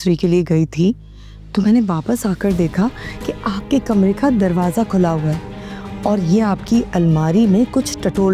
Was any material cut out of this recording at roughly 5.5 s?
no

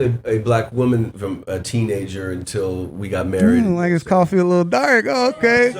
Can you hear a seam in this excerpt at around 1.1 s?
yes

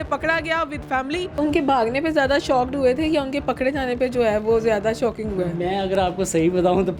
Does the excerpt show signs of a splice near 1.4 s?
yes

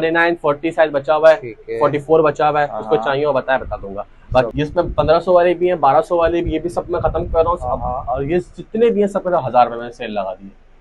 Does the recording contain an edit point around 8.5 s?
no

